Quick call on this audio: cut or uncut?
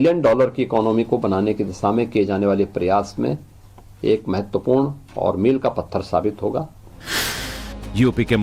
uncut